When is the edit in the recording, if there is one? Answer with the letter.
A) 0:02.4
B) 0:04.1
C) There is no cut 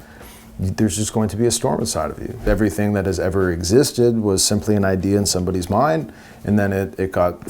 A